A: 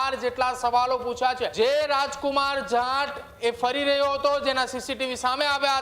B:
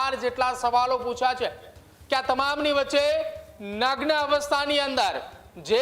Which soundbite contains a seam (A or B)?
A